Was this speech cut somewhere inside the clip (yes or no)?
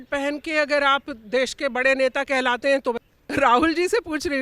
yes